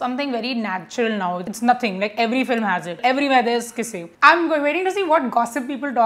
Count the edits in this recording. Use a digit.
3